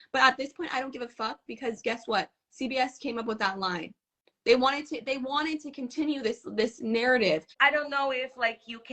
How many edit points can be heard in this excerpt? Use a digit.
1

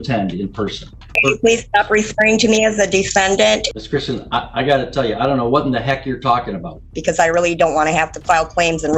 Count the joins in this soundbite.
3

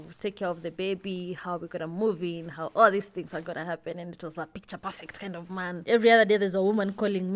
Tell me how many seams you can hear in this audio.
1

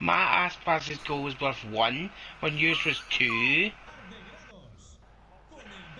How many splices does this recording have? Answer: 1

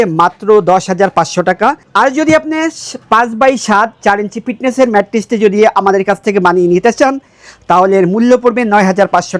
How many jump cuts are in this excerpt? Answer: 1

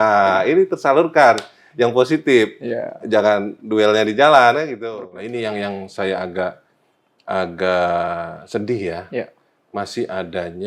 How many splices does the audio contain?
1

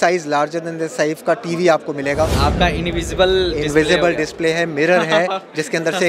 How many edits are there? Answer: 1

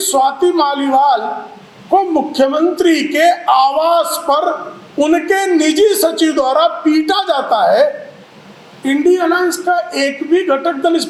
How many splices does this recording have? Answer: 0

